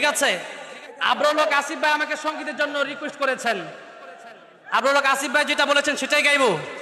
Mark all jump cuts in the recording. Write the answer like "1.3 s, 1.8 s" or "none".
none